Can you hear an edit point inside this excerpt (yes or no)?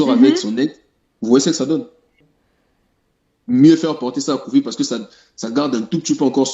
yes